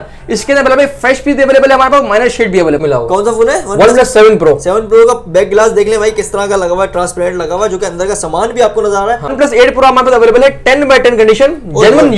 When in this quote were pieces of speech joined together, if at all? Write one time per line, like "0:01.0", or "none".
0:02.8
0:09.3